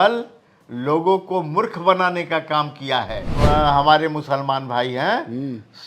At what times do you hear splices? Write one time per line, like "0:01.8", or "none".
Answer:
0:03.2